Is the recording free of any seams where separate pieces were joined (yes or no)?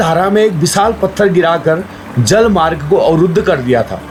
yes